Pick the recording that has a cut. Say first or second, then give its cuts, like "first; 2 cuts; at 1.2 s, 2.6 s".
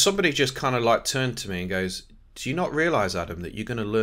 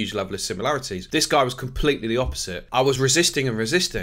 second; 2 cuts; at 1.0 s, 3.0 s